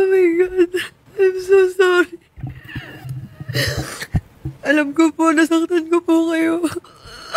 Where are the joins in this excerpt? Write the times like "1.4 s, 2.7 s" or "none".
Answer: 1.0 s

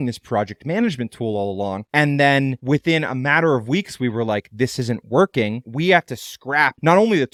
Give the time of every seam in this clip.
none

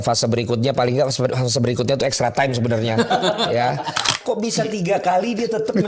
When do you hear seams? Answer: 4.2 s

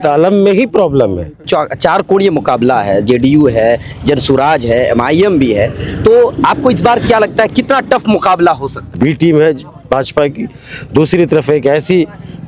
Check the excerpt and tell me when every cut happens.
1.4 s, 8.9 s

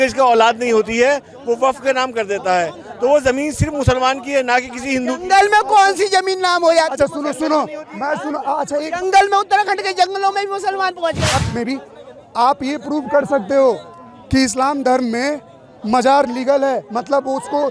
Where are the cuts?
11.4 s

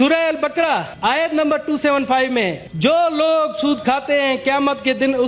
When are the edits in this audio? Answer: 0.9 s, 2.6 s

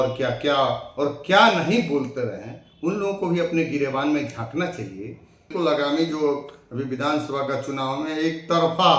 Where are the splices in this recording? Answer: 5.5 s

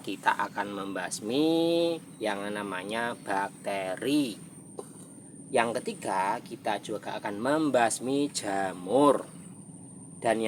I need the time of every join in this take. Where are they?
none

